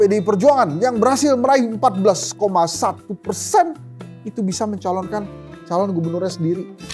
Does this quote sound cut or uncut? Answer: uncut